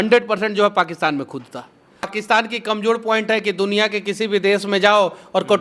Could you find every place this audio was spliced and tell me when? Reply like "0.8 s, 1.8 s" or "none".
2.1 s

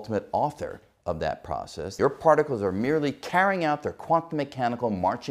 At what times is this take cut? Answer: 1.9 s

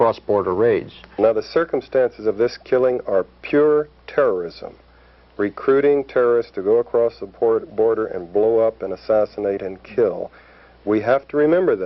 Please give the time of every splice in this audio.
1.2 s

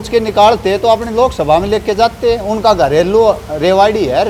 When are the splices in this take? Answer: none

